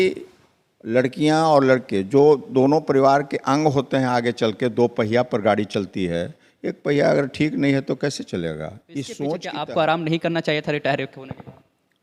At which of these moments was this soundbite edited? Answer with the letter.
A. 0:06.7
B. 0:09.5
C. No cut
B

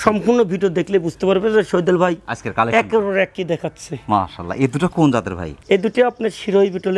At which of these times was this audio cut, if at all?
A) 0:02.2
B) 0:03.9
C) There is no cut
C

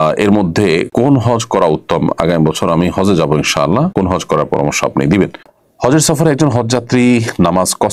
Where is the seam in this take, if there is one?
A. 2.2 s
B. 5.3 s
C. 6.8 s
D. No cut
B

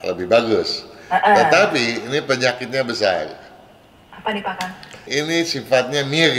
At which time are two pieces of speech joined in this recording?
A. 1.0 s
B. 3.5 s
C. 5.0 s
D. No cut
C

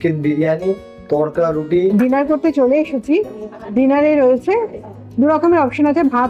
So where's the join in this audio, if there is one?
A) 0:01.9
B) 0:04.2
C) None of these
A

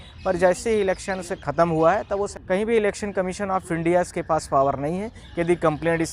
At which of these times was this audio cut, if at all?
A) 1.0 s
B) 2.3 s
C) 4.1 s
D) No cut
B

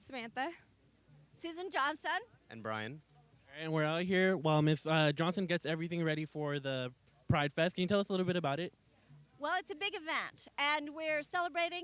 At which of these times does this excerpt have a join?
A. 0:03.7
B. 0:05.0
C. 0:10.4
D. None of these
C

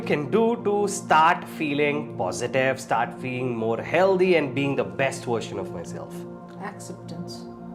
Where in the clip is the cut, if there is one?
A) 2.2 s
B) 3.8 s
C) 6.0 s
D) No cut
D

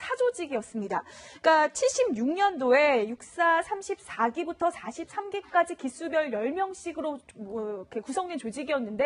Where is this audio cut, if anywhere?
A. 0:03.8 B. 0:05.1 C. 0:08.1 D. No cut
C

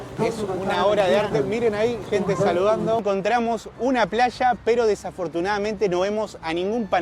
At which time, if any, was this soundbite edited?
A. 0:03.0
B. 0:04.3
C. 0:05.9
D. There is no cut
A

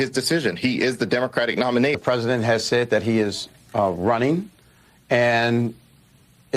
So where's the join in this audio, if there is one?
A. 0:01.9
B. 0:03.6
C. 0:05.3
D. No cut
A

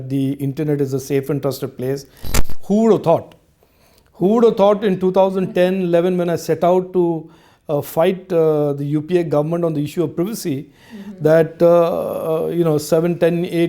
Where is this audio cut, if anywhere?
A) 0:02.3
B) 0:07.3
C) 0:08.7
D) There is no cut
A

